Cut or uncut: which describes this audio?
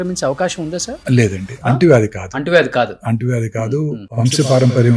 cut